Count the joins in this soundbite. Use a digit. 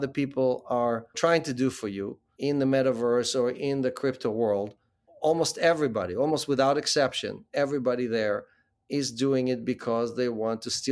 2